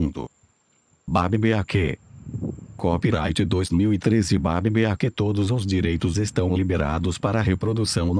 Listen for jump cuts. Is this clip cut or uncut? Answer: cut